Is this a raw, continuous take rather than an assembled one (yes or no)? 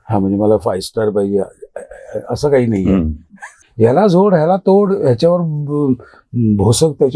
no